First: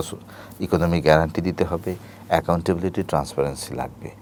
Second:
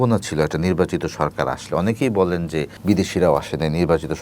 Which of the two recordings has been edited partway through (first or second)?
second